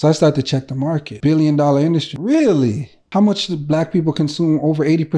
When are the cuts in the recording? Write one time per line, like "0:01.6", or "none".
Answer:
0:01.1
0:02.1
0:02.9